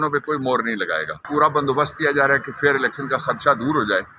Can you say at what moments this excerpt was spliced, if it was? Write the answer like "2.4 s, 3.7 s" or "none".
1.2 s